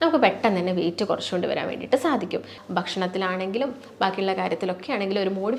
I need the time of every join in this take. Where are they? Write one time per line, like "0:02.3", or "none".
0:02.5